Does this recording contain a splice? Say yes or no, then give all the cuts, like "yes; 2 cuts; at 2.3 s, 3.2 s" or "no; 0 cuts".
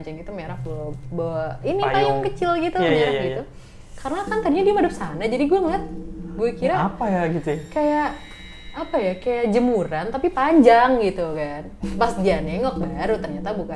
no; 0 cuts